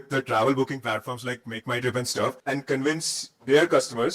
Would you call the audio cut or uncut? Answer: cut